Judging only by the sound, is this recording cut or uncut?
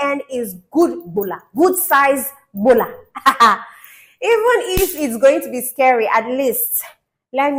uncut